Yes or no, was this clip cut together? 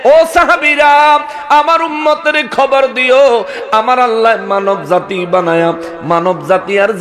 no